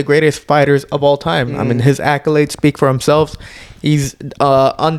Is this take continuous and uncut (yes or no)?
yes